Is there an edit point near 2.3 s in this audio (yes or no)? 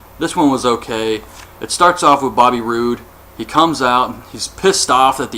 no